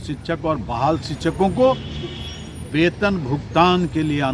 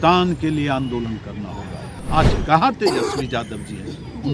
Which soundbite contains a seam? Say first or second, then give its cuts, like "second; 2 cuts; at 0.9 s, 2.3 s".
second; 1 cut; at 1.9 s